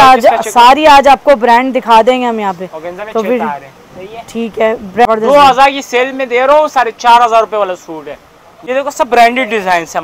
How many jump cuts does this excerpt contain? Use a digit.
2